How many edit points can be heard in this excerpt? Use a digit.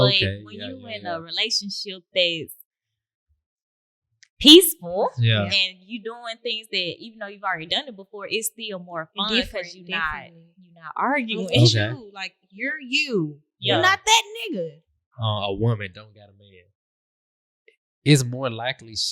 1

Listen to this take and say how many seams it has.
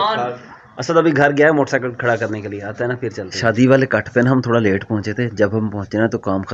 1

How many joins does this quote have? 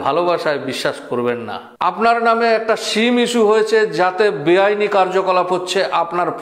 1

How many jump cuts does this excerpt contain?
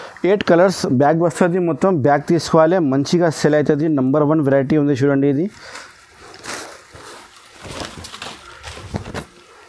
0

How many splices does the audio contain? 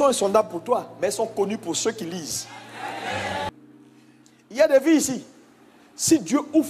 1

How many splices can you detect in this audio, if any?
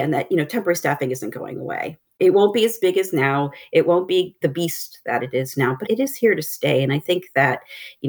1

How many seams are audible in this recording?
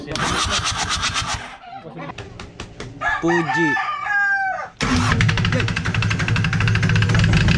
1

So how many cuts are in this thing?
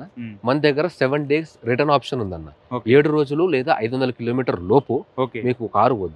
0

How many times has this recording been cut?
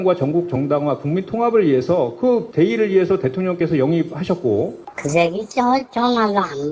1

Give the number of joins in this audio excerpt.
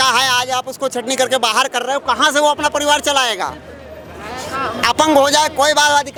0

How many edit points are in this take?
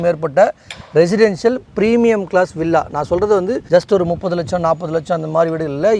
0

